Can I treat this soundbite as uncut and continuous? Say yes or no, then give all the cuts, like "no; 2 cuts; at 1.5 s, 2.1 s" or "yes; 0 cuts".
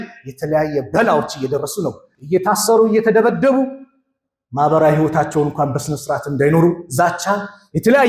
yes; 0 cuts